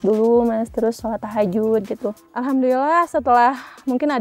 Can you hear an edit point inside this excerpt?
yes; 1 cut; at 2.2 s

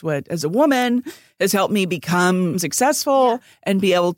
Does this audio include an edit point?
yes; 1 cut; at 2.6 s

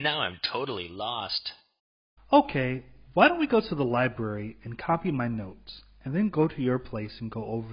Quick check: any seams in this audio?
no; 0 cuts

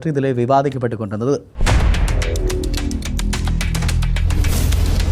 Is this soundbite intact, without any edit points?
no; 1 cut; at 1.5 s

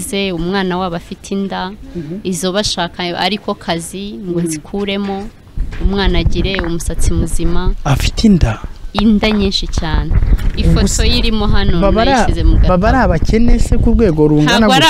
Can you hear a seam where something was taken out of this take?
no; 0 cuts

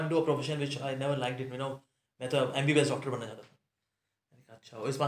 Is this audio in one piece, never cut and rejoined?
yes; 0 cuts

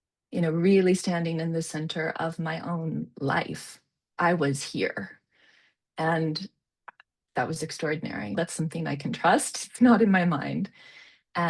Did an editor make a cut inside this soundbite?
yes; 2 cuts; at 4.1 s, 8.4 s

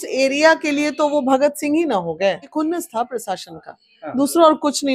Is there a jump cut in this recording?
yes; 1 cut; at 2.4 s

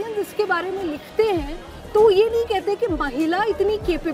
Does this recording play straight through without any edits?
yes; 0 cuts

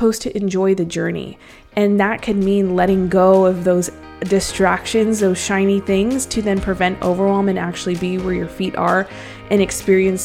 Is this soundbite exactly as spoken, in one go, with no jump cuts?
yes; 0 cuts

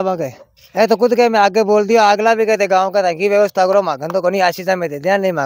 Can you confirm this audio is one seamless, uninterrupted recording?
yes; 0 cuts

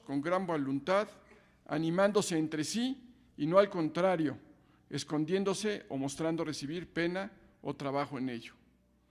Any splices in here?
yes; 1 cut; at 5.8 s

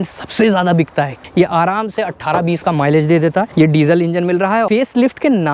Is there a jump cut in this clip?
yes; 3 cuts; at 1.2 s, 3.5 s, 4.7 s

